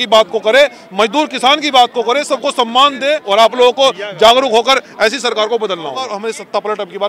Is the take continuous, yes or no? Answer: no